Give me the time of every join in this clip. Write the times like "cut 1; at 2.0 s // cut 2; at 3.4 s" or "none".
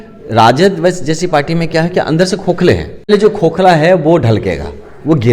cut 1; at 3.1 s